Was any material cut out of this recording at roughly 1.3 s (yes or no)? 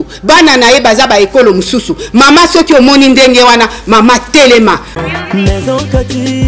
no